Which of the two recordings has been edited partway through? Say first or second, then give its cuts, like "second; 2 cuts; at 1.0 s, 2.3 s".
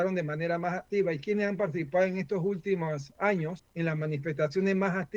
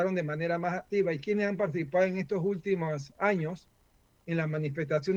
first; 1 cut; at 3.6 s